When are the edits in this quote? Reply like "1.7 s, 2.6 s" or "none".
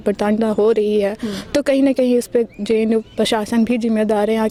none